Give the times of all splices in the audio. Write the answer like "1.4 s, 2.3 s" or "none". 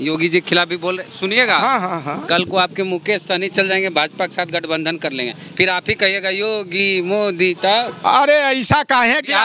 none